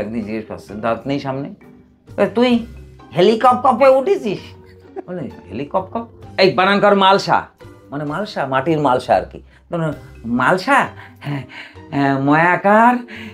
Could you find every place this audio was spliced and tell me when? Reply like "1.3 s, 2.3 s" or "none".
6.2 s